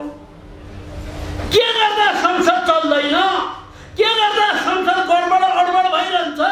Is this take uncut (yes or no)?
yes